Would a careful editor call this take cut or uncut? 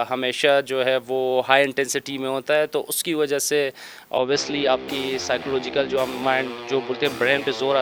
uncut